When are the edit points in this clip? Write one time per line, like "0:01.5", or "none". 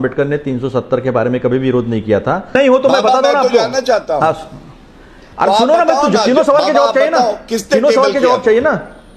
0:02.5